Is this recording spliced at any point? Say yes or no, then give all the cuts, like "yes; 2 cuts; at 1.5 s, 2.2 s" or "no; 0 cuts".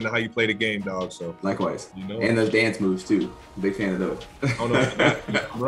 yes; 1 cut; at 1.9 s